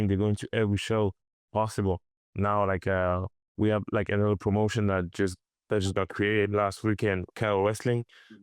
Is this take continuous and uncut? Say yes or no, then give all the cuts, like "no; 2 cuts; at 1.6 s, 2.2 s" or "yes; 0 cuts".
yes; 0 cuts